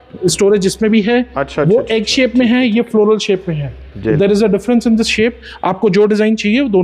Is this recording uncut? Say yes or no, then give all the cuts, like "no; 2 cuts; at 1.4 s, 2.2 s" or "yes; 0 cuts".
yes; 0 cuts